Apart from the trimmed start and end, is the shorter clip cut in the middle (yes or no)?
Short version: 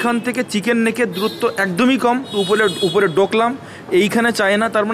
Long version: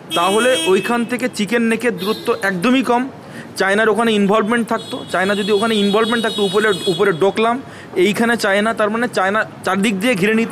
yes